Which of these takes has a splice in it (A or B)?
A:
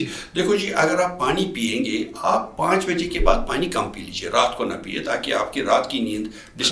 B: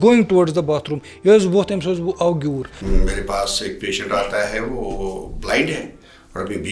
B